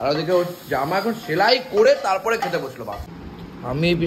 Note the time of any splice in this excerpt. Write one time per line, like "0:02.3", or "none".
0:03.0